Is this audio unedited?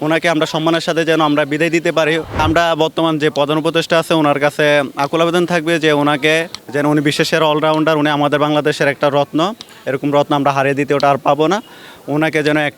no; 2 cuts; at 2.4 s, 6.6 s

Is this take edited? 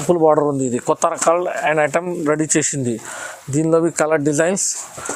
no; 0 cuts

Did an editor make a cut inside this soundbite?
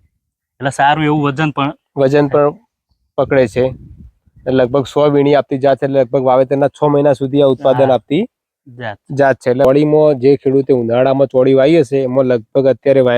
yes; 1 cut; at 9.6 s

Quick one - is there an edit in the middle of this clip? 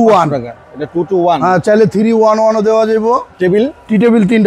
no; 0 cuts

